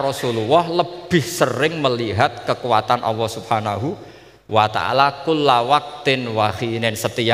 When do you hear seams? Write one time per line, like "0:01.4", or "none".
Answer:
none